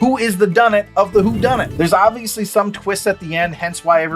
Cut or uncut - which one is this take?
cut